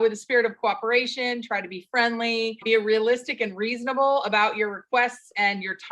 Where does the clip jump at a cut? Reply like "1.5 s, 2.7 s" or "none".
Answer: 2.6 s